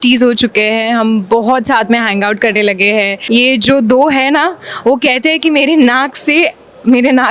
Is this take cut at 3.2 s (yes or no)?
yes